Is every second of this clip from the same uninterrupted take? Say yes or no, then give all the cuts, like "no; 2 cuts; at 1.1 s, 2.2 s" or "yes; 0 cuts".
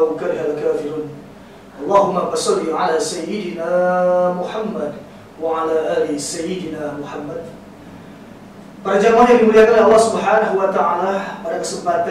yes; 0 cuts